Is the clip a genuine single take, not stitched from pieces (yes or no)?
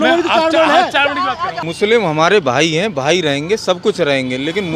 no